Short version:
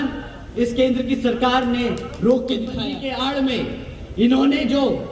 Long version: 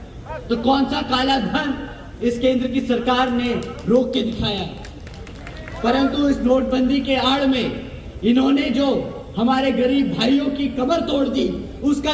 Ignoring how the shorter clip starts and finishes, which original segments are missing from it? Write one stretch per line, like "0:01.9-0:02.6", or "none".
0:04.6-0:07.0